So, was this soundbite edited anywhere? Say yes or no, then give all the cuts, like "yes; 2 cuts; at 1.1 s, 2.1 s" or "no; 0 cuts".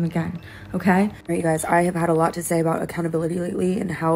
yes; 1 cut; at 1.2 s